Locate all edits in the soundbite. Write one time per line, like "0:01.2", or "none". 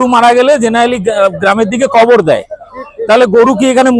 none